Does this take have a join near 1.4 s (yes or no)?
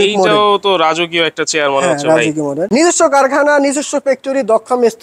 no